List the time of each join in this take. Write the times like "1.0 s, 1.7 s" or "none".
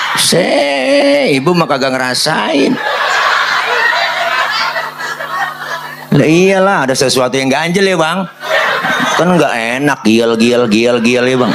none